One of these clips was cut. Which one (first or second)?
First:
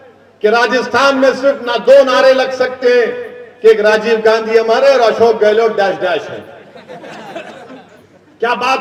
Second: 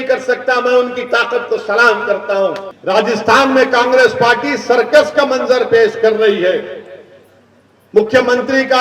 second